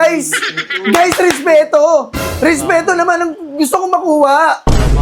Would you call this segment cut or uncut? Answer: uncut